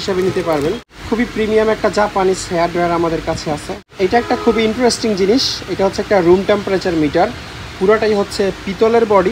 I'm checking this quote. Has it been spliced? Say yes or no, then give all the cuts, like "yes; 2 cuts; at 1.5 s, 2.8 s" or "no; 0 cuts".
yes; 2 cuts; at 0.9 s, 3.8 s